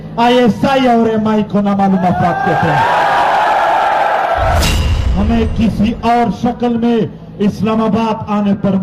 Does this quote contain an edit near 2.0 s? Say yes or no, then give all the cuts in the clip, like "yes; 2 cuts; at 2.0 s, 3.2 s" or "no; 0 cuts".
no; 1 cut; at 4.6 s